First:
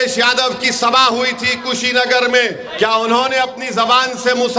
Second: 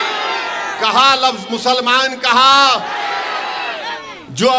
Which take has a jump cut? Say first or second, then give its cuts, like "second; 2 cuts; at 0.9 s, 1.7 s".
first; 1 cut; at 2.6 s